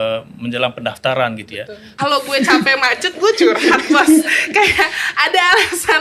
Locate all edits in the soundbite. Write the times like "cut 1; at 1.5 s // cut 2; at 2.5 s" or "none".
cut 1; at 1.9 s